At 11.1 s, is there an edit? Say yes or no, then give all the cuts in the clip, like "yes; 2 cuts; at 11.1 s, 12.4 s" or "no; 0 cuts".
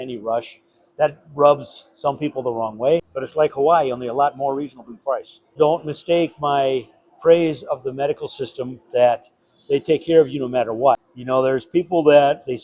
yes; 3 cuts; at 3.1 s, 5.5 s, 11.1 s